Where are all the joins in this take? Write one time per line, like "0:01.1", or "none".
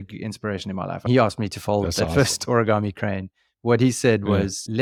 none